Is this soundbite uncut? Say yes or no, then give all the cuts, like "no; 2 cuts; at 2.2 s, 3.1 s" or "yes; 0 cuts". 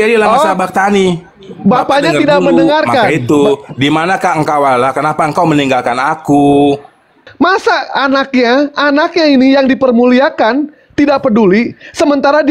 no; 1 cut; at 7.2 s